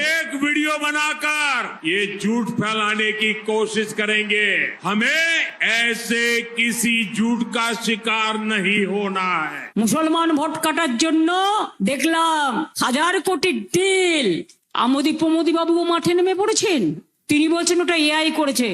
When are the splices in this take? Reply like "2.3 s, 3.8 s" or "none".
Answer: 9.6 s